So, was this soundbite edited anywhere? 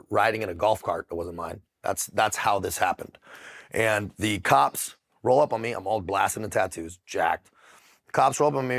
no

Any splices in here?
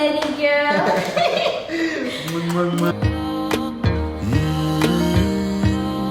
yes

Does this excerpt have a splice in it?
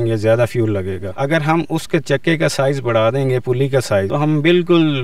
yes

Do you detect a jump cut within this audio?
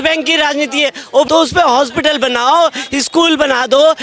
yes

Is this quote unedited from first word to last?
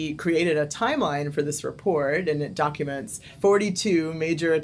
yes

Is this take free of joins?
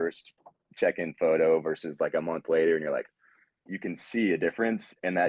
no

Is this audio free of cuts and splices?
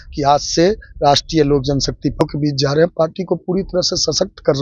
no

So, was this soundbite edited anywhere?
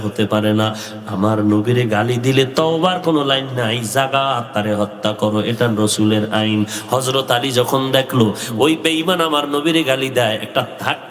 no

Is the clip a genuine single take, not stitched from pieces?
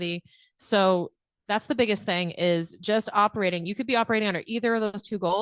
yes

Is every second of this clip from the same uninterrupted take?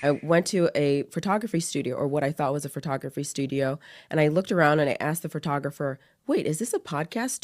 yes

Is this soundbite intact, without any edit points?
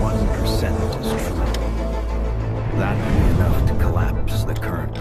no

